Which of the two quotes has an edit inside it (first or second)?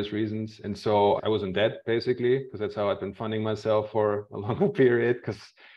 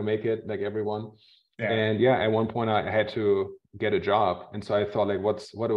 first